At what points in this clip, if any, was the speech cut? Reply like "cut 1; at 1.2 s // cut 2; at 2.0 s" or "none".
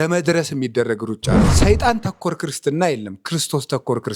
cut 1; at 1.5 s